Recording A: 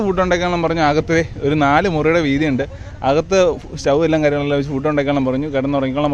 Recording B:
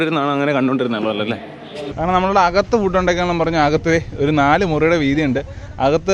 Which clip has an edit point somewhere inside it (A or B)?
B